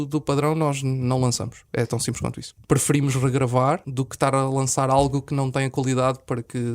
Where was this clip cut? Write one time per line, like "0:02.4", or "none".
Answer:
0:02.5
0:04.0